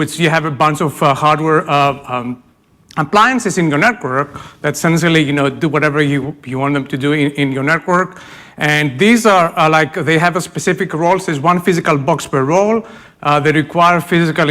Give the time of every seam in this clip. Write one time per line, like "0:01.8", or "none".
0:09.8